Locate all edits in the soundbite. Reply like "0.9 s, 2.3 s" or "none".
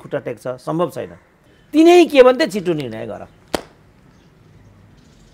1.5 s